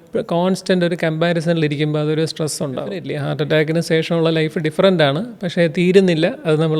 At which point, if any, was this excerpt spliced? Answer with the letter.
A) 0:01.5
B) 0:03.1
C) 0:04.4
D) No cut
B